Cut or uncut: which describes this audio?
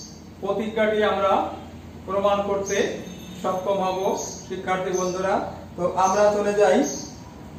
uncut